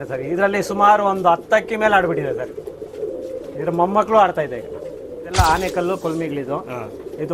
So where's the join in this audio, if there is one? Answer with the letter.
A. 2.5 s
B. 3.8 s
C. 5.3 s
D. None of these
C